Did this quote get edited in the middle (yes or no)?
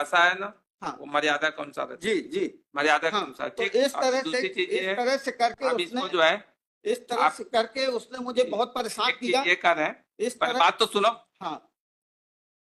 no